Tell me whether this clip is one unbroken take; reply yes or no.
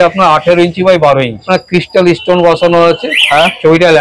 no